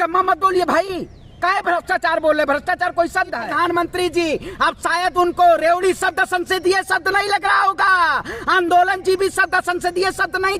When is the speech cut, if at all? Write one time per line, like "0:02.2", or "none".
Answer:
0:03.4